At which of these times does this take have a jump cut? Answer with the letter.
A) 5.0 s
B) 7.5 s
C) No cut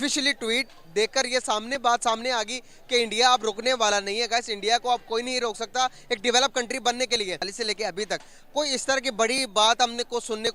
B